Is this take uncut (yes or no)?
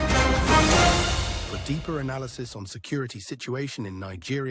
no